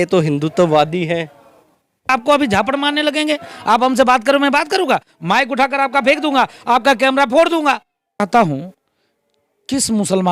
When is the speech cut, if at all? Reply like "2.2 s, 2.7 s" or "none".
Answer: 2.1 s, 8.2 s